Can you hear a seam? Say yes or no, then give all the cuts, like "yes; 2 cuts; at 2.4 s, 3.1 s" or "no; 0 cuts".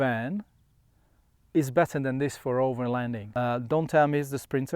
yes; 1 cut; at 3.2 s